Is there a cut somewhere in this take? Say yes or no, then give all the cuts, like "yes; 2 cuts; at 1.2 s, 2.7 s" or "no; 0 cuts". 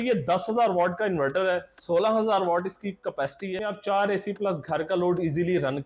yes; 1 cut; at 3.5 s